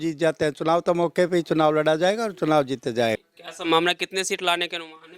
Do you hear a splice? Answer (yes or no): yes